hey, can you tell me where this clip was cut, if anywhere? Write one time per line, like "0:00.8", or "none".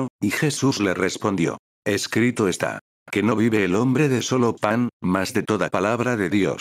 0:01.7
0:05.0